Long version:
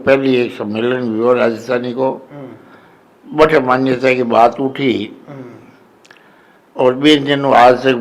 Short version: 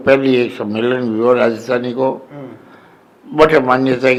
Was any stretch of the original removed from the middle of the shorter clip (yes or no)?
no